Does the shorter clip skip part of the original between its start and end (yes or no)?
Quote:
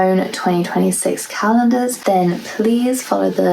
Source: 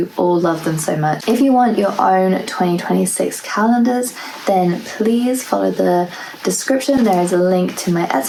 yes